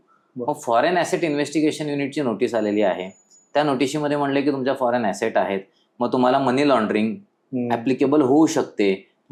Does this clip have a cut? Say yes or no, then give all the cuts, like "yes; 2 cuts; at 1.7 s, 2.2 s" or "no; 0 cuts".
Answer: no; 0 cuts